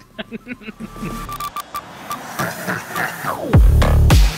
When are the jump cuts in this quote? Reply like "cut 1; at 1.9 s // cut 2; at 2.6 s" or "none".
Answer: cut 1; at 1.1 s